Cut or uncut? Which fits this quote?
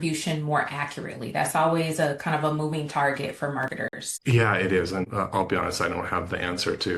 cut